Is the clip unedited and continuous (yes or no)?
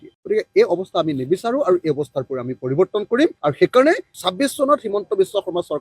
no